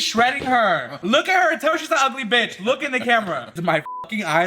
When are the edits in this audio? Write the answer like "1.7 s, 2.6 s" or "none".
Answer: 0.9 s, 3.5 s